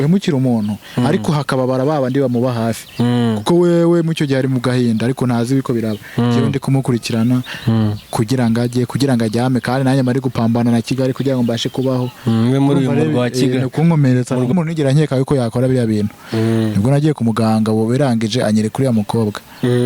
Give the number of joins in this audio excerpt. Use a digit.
1